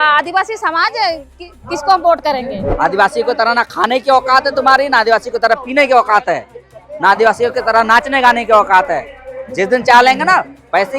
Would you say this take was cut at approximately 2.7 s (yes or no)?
yes